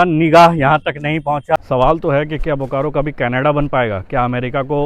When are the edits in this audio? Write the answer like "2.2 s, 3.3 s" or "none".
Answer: 1.6 s